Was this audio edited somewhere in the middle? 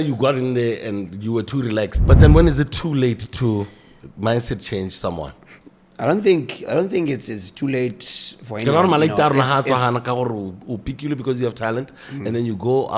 yes; 1 cut; at 2.0 s

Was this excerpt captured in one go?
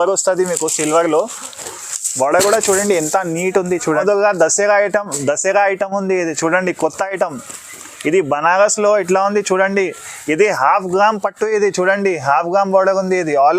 no; 1 cut; at 4.0 s

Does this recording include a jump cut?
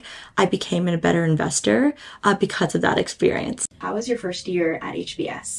yes; 1 cut; at 3.8 s

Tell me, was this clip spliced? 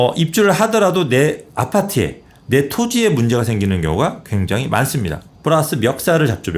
yes; 1 cut; at 5.2 s

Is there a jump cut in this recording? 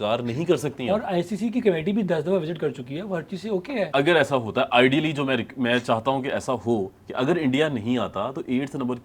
yes; 1 cut; at 3.9 s

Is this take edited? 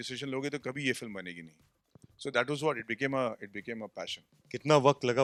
no; 0 cuts

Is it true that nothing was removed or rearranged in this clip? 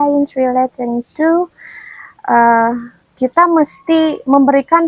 yes; 0 cuts

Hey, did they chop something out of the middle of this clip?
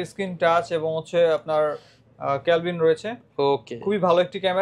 no; 0 cuts

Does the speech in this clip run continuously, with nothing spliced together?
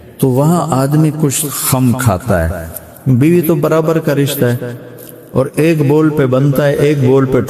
yes; 0 cuts

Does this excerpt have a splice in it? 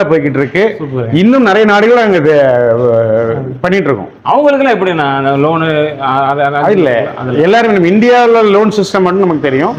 no; 0 cuts

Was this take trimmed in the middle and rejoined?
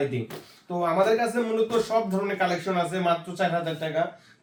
no; 0 cuts

